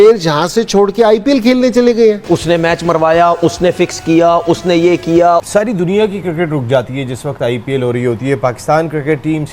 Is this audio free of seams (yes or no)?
no